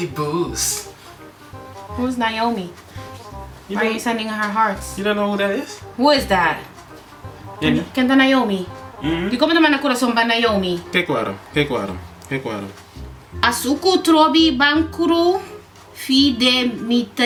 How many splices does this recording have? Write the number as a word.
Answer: zero